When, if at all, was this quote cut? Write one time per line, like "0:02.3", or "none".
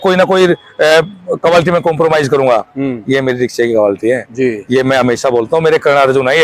none